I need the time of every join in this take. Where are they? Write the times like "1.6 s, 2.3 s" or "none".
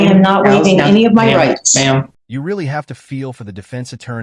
none